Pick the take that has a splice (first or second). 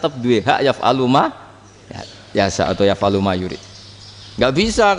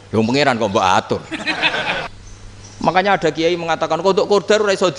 second